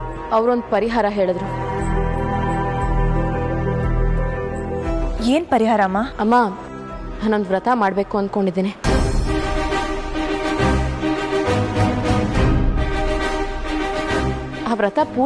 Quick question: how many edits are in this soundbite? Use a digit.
0